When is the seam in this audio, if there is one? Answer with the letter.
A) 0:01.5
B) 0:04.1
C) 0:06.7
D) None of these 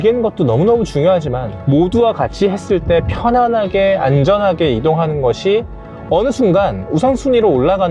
A